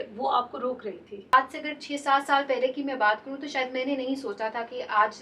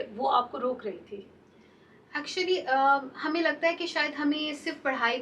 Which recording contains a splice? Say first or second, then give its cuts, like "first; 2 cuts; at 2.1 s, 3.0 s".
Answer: first; 1 cut; at 1.3 s